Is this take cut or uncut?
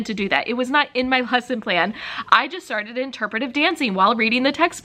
uncut